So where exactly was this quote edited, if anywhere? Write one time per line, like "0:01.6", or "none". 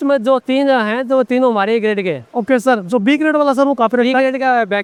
none